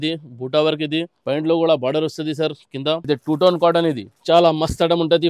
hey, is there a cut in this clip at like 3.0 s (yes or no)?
yes